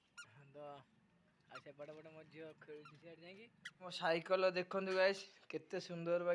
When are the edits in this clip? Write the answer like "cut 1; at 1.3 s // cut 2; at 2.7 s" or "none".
cut 1; at 3.9 s

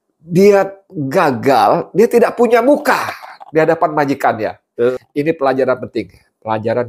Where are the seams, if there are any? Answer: cut 1; at 4.6 s

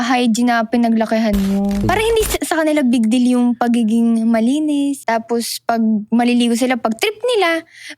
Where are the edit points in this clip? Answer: cut 1; at 1.9 s // cut 2; at 5.0 s

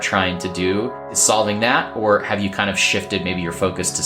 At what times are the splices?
cut 1; at 1.1 s

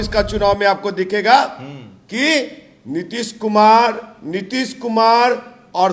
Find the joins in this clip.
none

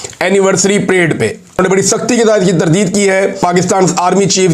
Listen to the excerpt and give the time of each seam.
cut 1; at 1.6 s // cut 2; at 3.4 s

